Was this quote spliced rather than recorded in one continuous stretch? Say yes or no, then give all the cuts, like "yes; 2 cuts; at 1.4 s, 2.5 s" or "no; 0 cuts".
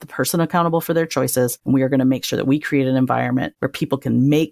yes; 2 cuts; at 1.6 s, 3.6 s